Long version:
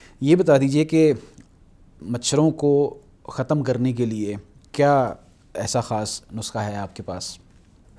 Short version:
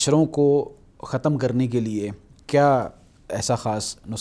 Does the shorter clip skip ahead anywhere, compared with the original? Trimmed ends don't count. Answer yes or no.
no